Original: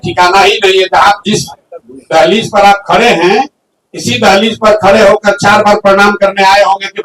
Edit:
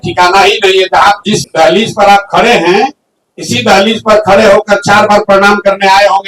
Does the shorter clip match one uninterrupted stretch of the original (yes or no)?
no